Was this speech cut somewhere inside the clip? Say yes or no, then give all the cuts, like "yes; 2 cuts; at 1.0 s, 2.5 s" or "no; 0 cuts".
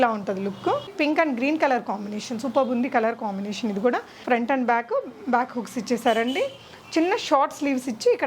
yes; 2 cuts; at 0.9 s, 4.1 s